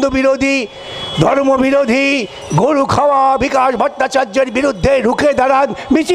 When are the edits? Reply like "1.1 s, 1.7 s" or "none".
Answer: none